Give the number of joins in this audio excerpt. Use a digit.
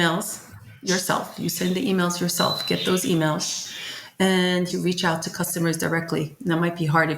1